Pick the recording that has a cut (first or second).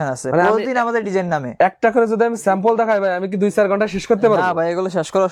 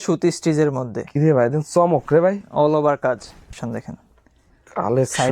second